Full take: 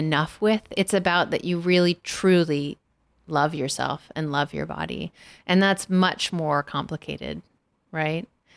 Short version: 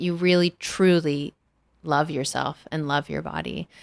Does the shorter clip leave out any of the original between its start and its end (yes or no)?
no